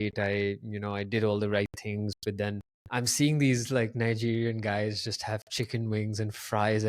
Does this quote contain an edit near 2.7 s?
yes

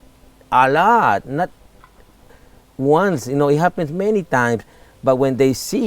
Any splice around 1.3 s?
no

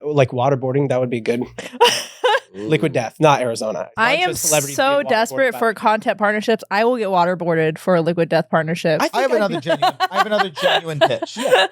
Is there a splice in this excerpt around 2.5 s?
no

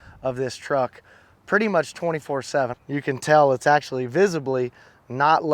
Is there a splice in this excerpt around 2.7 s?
yes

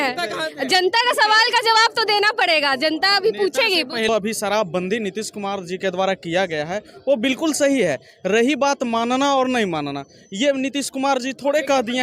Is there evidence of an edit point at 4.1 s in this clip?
yes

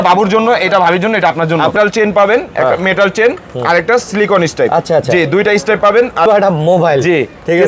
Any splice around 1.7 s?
yes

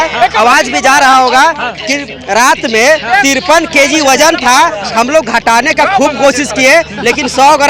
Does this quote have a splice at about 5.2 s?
no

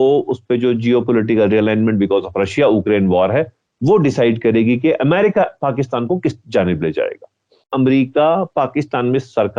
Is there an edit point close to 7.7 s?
yes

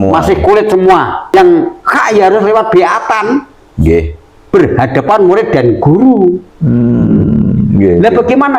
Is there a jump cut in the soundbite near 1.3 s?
yes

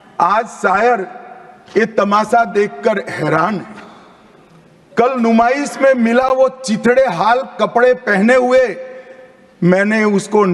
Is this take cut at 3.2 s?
no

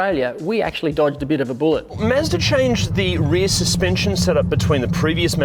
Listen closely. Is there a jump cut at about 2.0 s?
yes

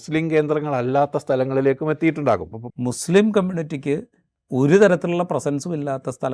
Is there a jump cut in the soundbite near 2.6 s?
yes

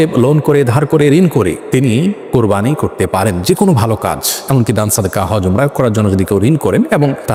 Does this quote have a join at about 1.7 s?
no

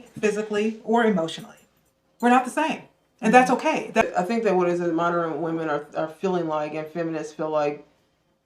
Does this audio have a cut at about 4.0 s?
yes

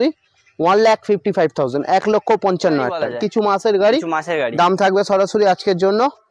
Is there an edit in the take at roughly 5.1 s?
no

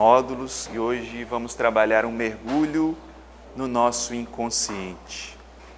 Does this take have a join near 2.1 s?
no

